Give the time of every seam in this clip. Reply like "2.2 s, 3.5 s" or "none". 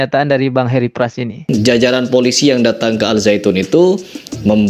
1.4 s